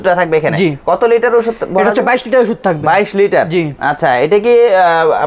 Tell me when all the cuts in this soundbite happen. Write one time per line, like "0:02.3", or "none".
none